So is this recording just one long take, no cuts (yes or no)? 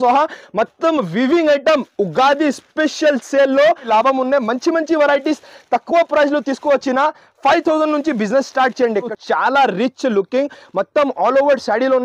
no